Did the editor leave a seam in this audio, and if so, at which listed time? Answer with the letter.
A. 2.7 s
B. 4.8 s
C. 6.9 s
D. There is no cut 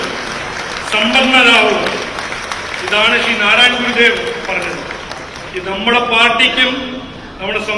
D